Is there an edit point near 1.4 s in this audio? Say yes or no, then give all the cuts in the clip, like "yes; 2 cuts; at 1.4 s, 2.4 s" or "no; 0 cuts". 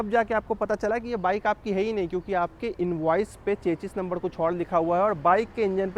no; 0 cuts